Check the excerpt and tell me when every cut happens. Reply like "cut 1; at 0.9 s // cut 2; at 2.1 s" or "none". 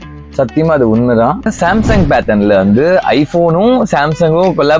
cut 1; at 1.4 s